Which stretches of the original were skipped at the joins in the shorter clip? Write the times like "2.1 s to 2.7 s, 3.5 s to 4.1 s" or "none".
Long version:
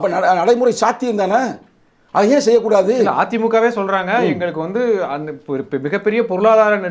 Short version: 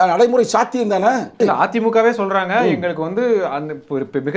1.7 s to 3.0 s